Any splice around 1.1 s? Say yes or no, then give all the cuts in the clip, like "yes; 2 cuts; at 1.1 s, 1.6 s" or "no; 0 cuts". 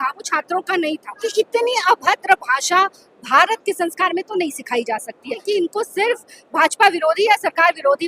yes; 2 cuts; at 1.1 s, 5.4 s